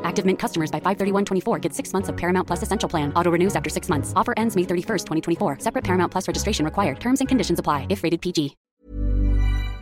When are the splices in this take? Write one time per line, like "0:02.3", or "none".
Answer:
0:08.6